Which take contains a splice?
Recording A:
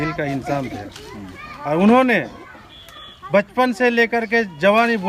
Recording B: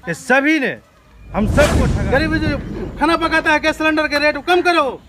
B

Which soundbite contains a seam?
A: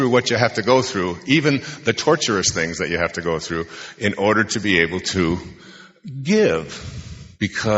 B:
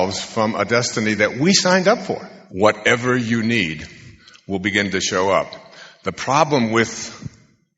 B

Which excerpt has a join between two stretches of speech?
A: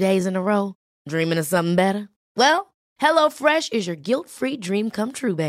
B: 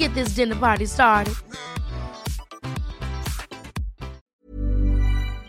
B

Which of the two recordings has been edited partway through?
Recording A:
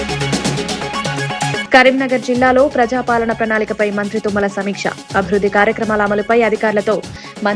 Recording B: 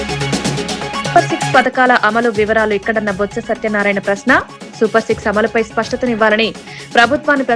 B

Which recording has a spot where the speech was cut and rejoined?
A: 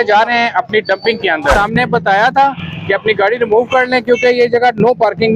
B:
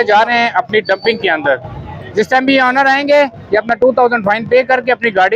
A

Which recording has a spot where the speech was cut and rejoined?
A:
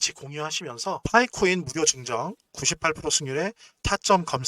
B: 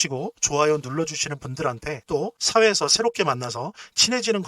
B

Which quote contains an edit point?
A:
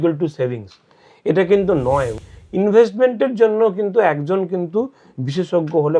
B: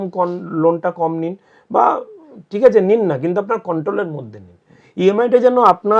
A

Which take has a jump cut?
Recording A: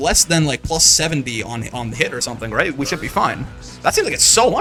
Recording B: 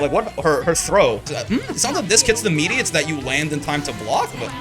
B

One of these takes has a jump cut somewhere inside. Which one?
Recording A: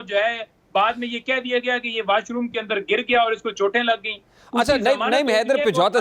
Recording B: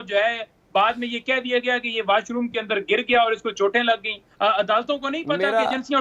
B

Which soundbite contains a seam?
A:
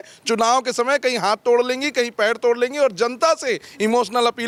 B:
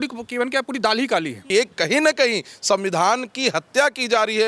B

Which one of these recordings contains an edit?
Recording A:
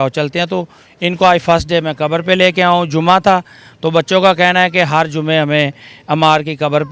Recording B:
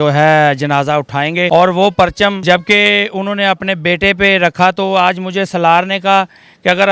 B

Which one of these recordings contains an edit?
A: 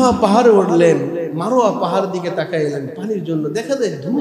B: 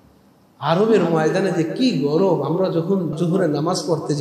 B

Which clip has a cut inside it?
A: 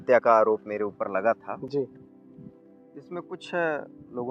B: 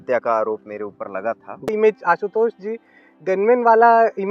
B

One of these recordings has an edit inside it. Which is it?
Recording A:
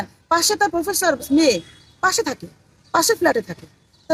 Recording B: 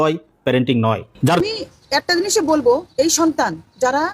B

